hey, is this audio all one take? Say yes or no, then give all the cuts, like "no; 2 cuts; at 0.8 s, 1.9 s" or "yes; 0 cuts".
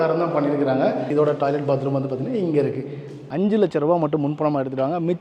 no; 2 cuts; at 1.1 s, 3.3 s